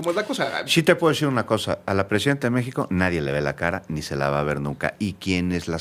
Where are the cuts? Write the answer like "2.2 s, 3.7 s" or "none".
none

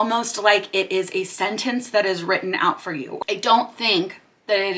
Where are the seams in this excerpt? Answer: 3.2 s

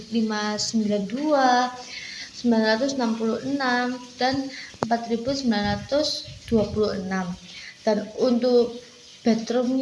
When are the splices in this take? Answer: none

